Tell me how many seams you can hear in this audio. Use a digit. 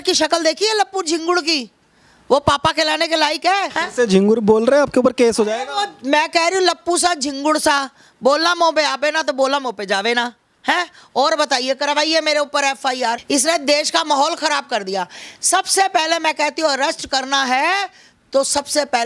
0